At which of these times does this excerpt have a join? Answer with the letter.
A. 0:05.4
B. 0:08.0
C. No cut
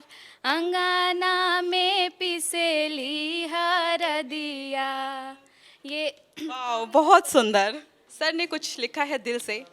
B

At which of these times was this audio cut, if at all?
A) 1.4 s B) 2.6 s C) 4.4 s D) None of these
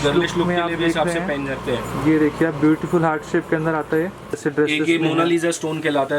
C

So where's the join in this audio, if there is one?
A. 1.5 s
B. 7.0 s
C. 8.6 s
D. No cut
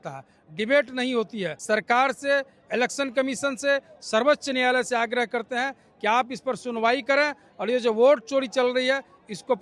A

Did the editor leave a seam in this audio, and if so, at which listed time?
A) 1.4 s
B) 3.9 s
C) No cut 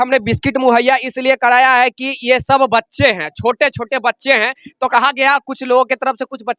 C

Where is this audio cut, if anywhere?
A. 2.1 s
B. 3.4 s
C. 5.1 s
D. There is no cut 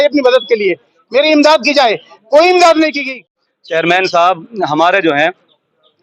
B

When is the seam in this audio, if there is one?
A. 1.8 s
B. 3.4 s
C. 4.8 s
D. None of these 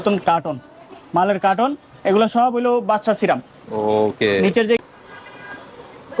C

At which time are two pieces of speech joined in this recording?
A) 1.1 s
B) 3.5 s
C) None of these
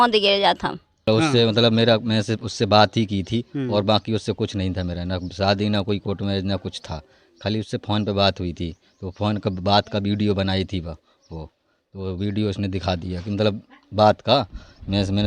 A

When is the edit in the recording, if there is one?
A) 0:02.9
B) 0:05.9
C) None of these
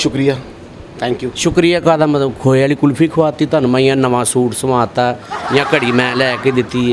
C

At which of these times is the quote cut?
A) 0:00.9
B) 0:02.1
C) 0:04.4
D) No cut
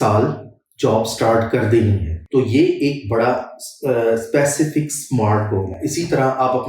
B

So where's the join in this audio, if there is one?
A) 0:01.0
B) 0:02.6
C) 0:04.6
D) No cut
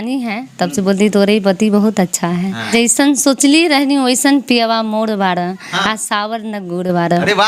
B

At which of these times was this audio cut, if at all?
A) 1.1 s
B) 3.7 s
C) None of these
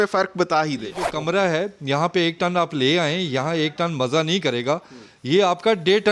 A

